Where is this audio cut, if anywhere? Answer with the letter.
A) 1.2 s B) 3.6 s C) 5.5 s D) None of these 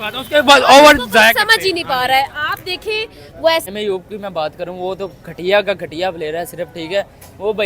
B